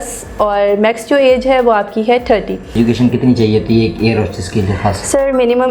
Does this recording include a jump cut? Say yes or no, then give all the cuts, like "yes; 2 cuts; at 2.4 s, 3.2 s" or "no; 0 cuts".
yes; 1 cut; at 2.8 s